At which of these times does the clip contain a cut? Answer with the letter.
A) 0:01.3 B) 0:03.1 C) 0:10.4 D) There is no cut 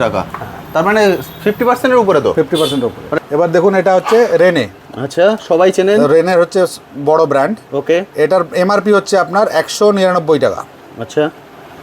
B